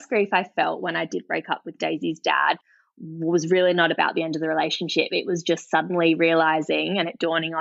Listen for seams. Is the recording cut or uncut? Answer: uncut